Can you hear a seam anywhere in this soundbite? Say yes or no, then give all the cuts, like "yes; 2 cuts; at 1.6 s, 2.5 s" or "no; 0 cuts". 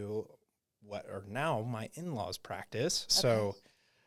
no; 0 cuts